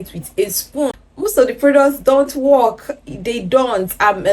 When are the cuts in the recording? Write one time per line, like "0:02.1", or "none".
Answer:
0:01.0